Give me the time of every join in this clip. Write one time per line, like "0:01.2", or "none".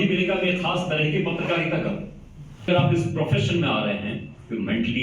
0:02.7